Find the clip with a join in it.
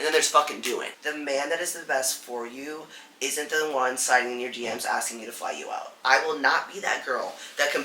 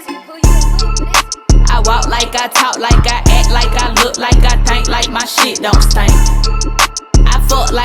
first; 2 cuts; at 1.0 s, 5.9 s

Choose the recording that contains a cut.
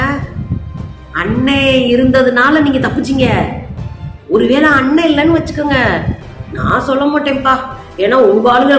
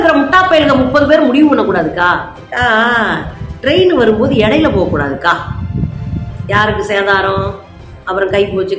second; 1 cut; at 2.4 s

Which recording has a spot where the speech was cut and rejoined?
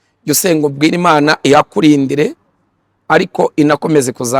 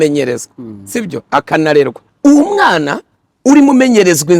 second; 1 cut; at 2.0 s

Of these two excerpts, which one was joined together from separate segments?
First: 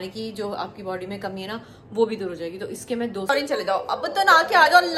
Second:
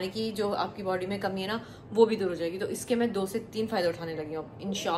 first; 1 cut; at 3.3 s

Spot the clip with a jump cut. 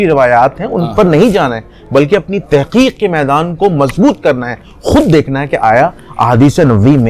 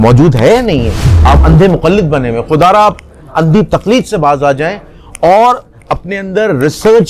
second; 1 cut; at 1.1 s

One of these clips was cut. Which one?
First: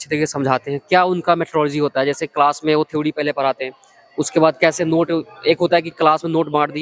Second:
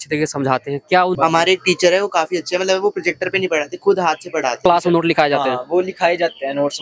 second; 2 cuts; at 1.2 s, 4.6 s

